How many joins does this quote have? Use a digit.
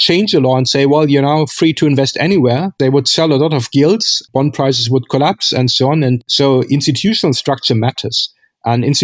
3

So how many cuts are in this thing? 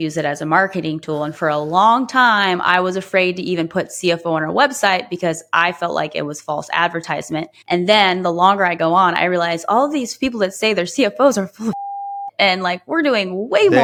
0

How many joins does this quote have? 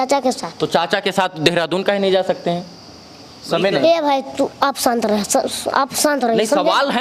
0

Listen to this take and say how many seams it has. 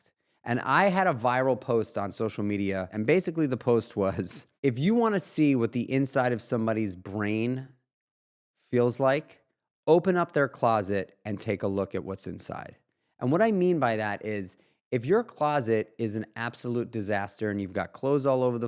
2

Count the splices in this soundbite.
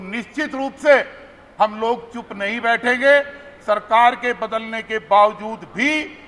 0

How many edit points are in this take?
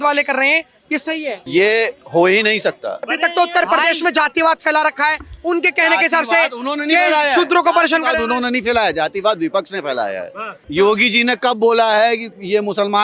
3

